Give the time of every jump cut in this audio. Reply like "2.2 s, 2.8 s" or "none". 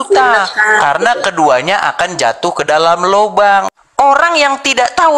3.8 s